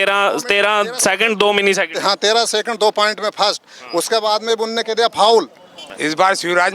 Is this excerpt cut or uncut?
cut